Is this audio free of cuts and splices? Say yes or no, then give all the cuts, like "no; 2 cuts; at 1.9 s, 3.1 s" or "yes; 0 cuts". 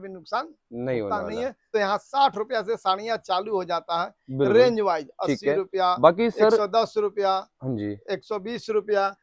no; 1 cut; at 1.6 s